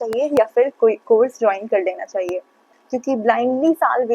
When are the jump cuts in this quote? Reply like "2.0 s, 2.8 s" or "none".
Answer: 2.5 s